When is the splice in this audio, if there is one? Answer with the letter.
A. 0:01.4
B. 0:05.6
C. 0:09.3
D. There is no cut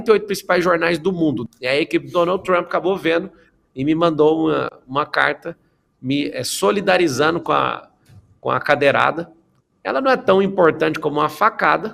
A